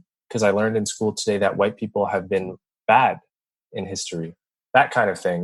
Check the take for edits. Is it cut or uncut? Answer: cut